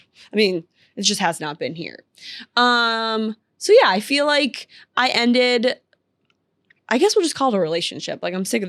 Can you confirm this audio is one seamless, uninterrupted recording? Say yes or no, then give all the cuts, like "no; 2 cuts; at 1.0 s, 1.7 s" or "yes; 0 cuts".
yes; 0 cuts